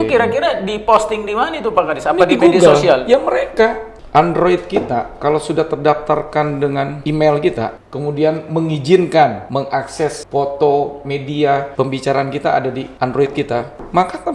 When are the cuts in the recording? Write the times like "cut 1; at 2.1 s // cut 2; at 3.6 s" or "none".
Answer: cut 1; at 7.0 s // cut 2; at 7.8 s // cut 3; at 9.7 s // cut 4; at 11.7 s // cut 5; at 13.4 s